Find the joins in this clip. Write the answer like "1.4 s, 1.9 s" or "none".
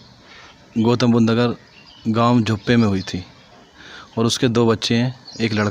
none